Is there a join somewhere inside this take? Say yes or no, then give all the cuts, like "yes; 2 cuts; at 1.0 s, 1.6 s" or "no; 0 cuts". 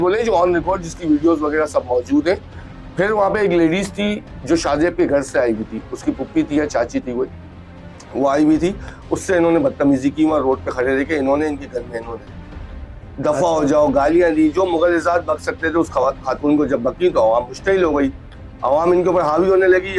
no; 0 cuts